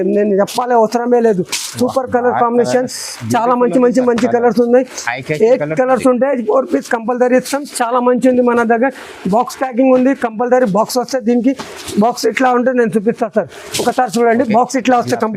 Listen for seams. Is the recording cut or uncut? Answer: uncut